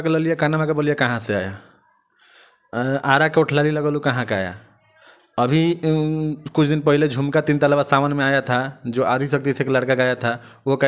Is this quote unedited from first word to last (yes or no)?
yes